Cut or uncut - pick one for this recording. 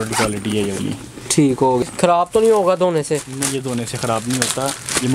cut